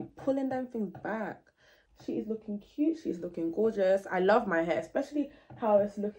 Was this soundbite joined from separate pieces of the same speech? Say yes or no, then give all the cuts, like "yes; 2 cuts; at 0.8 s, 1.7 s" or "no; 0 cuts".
yes; 1 cut; at 1.8 s